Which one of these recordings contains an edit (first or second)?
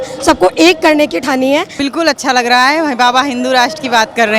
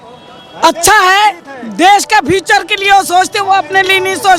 first